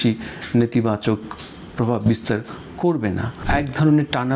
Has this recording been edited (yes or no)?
yes